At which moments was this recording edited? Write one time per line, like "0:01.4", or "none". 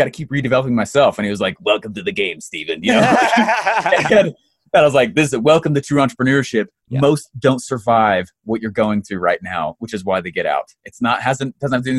none